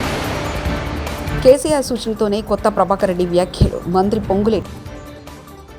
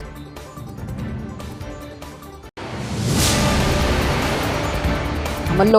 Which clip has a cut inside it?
first; 1 cut; at 1.2 s

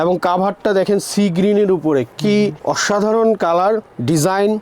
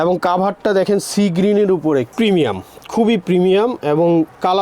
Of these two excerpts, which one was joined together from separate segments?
second; 1 cut; at 2.1 s

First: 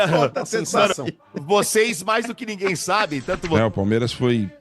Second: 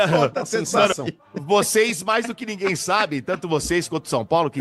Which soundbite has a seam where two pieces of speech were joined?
first; 1 cut; at 3.4 s

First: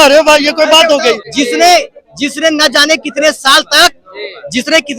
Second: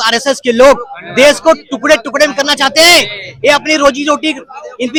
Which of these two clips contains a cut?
first; 1 cut; at 1.3 s

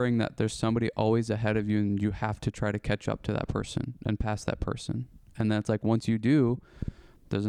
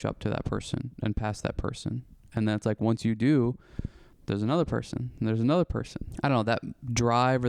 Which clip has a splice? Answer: second; 1 cut; at 6.0 s

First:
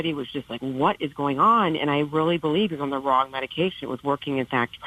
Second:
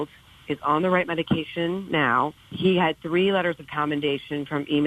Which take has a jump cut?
second; 1 cut; at 2.3 s

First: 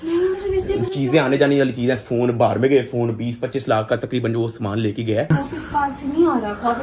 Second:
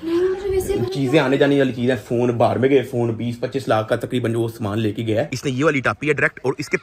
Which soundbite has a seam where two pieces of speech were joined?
second; 1 cut; at 5.3 s

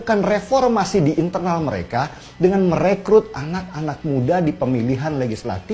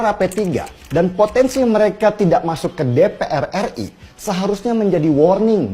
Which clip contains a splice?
second; 1 cut; at 1.1 s

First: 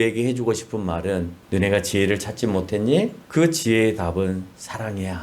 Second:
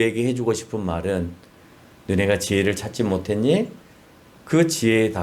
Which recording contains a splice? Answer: first; 2 cuts; at 1.4 s, 3.2 s

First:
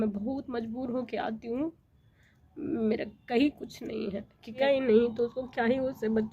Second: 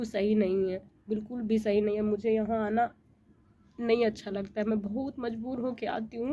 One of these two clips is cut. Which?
first; 1 cut; at 4.6 s

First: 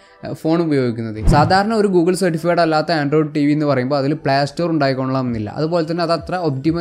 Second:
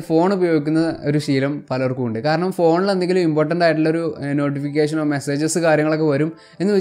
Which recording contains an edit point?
first; 1 cut; at 1.2 s

